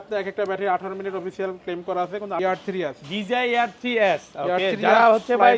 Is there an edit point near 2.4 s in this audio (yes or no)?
yes